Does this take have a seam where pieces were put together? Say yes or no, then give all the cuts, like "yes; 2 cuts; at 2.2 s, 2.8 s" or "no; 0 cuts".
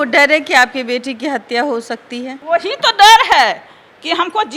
no; 0 cuts